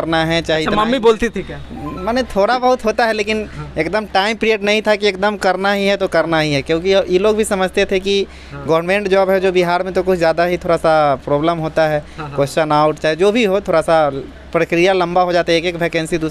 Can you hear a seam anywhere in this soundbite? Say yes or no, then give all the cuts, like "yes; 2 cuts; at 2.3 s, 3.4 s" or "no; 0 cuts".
no; 0 cuts